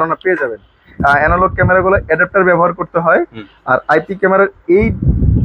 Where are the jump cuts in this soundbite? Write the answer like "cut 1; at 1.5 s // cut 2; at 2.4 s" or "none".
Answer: cut 1; at 0.9 s